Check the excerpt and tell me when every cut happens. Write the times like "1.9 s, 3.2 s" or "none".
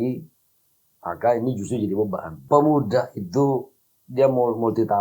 2.4 s